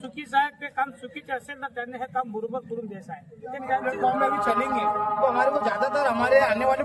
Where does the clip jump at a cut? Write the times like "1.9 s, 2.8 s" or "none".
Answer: 3.8 s